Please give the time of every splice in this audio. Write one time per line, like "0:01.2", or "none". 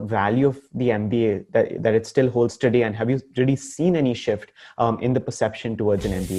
none